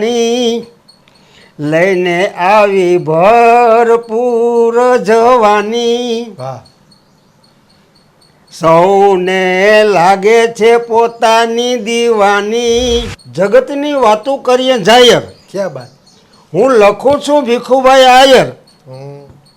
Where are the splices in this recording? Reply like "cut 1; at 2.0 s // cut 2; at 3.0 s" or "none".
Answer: cut 1; at 13.2 s